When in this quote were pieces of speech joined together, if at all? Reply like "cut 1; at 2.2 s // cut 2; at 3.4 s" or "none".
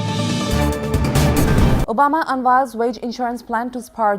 cut 1; at 1.8 s